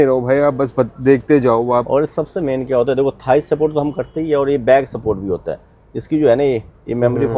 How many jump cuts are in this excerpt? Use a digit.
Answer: 0